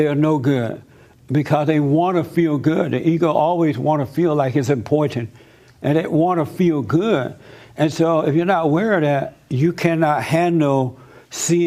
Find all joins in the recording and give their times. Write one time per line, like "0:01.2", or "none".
0:03.8